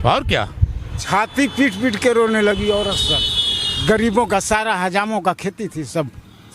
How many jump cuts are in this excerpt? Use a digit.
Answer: 1